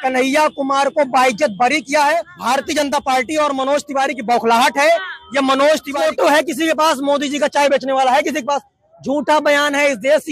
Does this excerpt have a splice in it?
yes; 2 cuts; at 2.3 s, 5.9 s

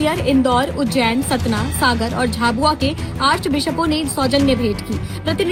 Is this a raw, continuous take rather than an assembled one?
yes; 0 cuts

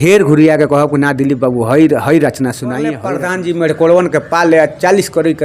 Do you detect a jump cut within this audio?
yes; 1 cut; at 3.1 s

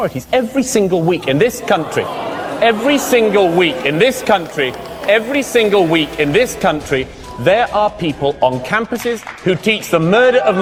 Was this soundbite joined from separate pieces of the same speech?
no; 0 cuts

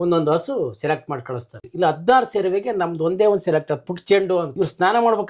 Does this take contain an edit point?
yes; 2 cuts; at 1.6 s, 4.5 s

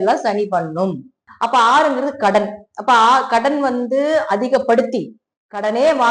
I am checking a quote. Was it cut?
yes; 1 cut; at 1.2 s

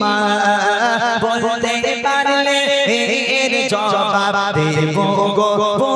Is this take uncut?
yes; 0 cuts

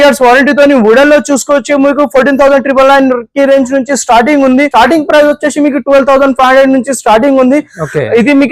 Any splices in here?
yes; 1 cut; at 4.7 s

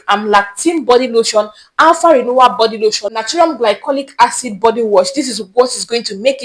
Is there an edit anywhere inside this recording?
yes; 1 cut; at 3.2 s

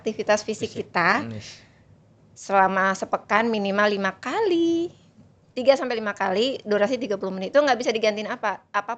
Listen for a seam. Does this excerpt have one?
no; 0 cuts

